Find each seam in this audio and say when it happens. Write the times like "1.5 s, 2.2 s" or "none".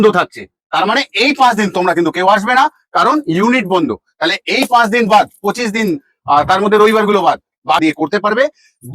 7.8 s